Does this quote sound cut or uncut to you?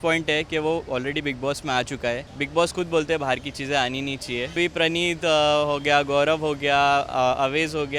cut